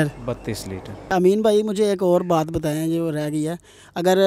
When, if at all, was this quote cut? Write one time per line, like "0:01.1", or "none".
0:01.1